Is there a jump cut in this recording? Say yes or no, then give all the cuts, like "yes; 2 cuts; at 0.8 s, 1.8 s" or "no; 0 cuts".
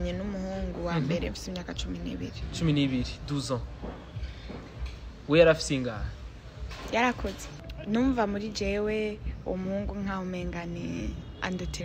yes; 1 cut; at 7.4 s